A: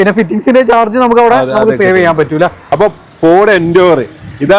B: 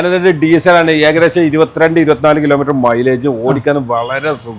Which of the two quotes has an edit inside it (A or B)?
A